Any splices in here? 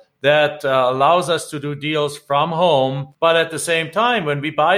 yes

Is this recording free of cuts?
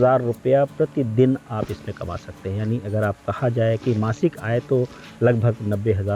yes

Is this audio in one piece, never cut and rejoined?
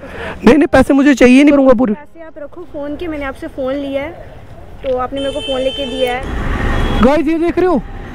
no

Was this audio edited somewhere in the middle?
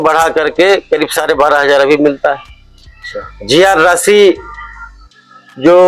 no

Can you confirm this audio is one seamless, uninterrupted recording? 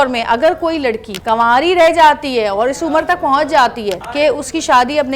no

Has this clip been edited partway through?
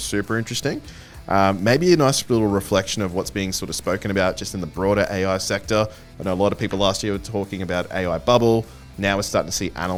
no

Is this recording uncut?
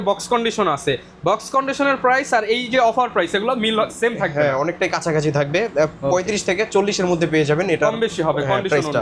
yes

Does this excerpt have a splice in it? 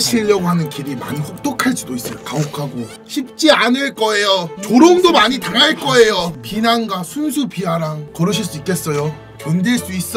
yes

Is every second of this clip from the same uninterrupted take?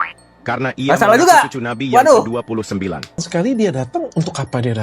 no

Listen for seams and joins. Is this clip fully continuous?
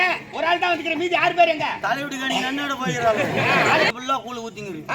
no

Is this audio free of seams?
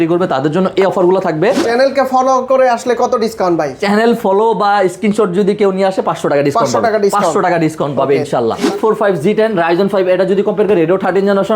no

